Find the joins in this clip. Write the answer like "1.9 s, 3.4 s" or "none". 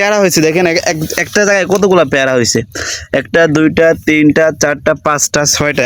none